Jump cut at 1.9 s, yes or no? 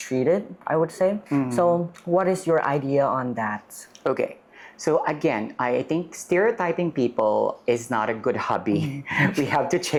no